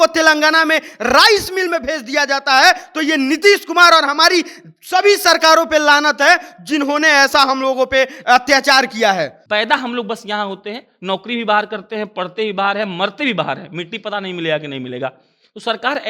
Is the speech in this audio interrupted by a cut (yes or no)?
yes